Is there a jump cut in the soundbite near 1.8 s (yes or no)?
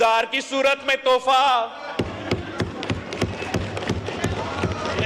no